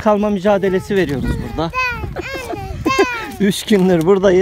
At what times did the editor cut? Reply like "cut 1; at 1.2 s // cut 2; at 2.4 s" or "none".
none

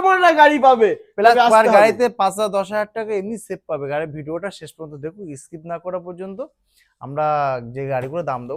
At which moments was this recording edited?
none

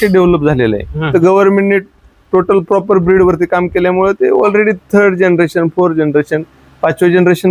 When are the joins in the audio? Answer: none

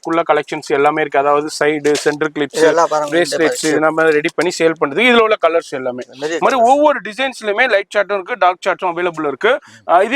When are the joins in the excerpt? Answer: none

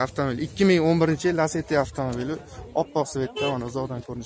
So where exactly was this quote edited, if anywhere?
none

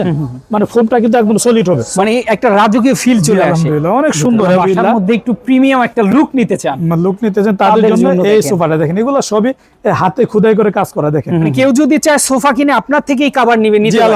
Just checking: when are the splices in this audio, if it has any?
cut 1; at 1.9 s // cut 2; at 4.6 s // cut 3; at 11.5 s

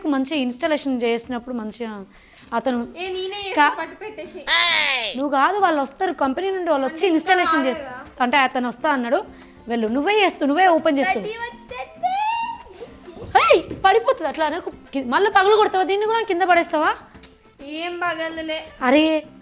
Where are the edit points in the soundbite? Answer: none

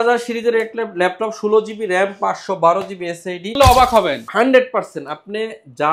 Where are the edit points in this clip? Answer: cut 1; at 3.6 s

